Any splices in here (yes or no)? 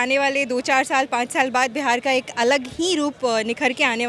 no